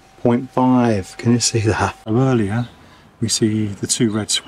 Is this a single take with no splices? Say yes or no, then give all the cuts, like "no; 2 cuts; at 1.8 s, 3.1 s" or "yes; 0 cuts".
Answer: no; 1 cut; at 2.0 s